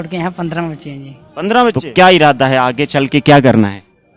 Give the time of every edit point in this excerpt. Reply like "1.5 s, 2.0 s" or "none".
1.8 s